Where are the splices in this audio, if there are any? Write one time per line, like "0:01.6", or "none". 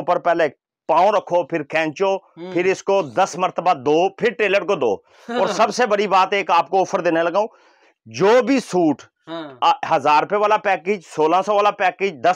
none